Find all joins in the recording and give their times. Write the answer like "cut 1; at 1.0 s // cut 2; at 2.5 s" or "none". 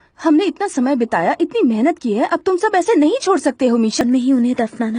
cut 1; at 4.0 s